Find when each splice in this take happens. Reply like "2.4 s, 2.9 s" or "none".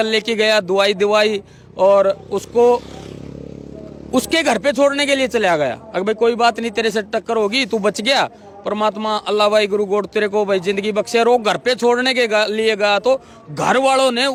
none

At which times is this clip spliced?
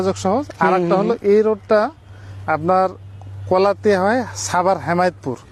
none

